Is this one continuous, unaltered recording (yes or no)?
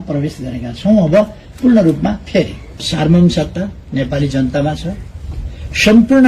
no